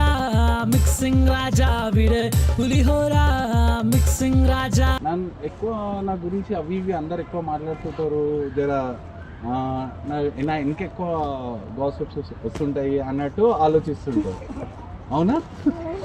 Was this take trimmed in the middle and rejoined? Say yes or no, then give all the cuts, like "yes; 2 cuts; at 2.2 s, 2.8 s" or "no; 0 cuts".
yes; 1 cut; at 5.0 s